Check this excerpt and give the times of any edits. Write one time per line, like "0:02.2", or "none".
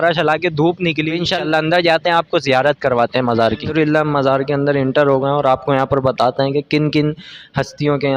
0:01.4

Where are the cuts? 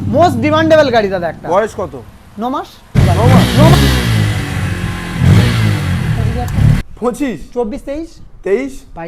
0:02.9
0:06.8

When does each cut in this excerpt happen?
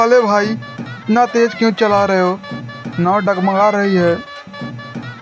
0:04.3

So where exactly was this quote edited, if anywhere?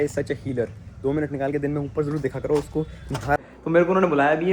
0:03.4

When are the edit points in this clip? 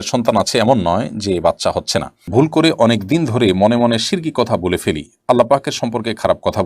0:02.3

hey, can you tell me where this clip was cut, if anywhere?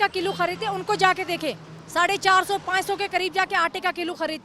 none

